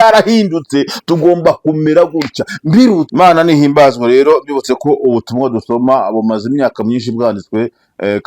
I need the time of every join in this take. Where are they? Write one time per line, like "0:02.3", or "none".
0:03.1